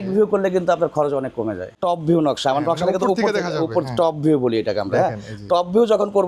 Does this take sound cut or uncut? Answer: cut